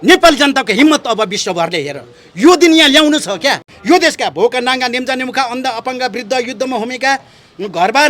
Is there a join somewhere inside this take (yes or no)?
yes